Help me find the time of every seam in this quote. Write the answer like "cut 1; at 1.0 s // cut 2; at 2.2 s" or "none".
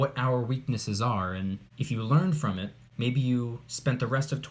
cut 1; at 1.7 s // cut 2; at 2.8 s